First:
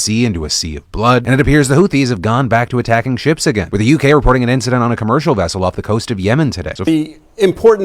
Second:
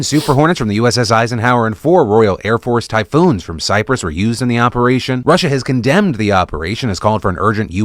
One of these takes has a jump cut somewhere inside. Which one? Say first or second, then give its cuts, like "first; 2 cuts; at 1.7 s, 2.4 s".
first; 1 cut; at 6.8 s